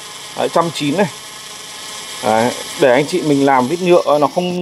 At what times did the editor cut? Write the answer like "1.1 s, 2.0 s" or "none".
none